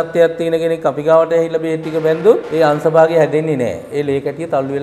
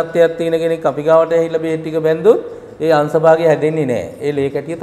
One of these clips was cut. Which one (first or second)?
first